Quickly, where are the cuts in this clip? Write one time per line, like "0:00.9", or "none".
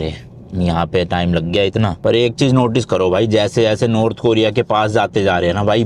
0:02.0